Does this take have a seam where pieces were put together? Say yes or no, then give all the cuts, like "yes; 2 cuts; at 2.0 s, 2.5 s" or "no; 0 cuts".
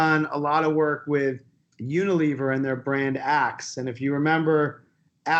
no; 0 cuts